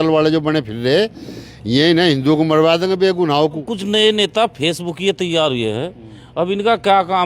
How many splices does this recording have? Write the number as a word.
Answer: one